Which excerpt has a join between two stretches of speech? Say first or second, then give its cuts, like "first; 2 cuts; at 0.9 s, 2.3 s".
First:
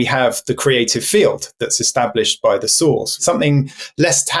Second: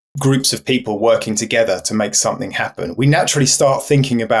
first; 1 cut; at 3.1 s